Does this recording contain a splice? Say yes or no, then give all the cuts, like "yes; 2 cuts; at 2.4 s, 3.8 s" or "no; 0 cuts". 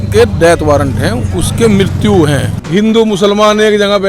yes; 1 cut; at 2.6 s